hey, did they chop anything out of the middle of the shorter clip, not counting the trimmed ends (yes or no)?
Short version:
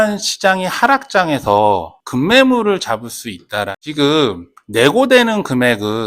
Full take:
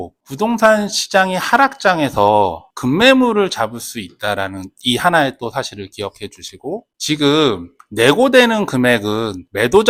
yes